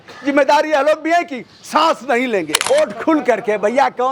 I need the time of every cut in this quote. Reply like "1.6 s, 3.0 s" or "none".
2.5 s